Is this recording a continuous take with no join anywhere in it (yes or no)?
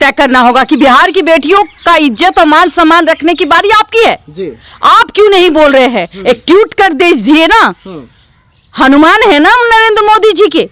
yes